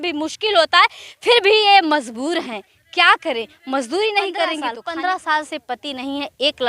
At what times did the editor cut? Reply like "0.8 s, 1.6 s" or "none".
4.8 s